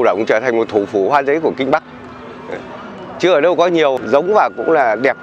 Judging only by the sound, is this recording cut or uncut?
cut